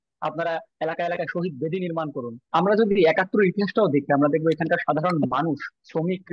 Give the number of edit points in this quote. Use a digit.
1